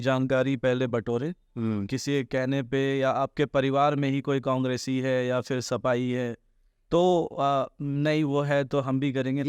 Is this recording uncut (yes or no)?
yes